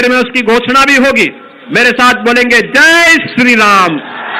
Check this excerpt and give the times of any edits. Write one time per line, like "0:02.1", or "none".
0:01.4